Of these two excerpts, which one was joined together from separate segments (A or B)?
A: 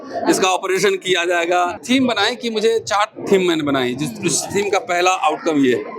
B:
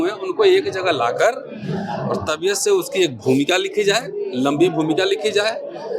A